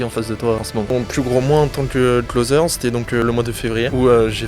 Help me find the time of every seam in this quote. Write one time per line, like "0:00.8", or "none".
0:00.9
0:02.3
0:03.3